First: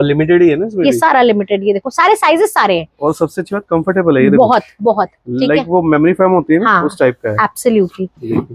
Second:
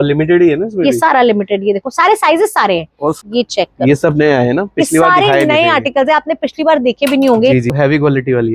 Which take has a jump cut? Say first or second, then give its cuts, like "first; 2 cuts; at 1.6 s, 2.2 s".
second; 2 cuts; at 3.2 s, 7.7 s